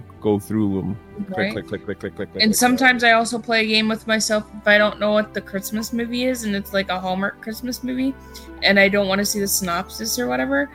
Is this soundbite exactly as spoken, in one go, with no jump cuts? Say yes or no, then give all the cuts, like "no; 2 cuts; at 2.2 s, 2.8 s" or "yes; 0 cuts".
yes; 0 cuts